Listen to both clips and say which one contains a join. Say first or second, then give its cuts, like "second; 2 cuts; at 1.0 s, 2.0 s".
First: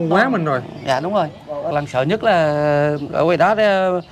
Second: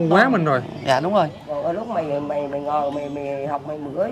first; 1 cut; at 1.7 s